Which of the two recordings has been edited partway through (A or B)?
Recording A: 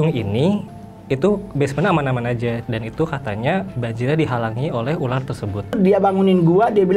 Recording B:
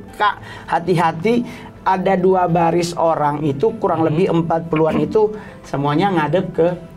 A